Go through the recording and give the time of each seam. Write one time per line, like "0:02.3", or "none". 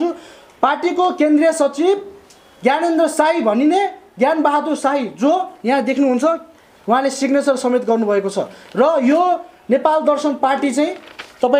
none